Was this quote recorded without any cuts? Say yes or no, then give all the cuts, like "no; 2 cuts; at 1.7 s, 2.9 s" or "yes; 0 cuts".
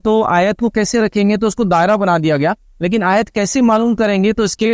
yes; 0 cuts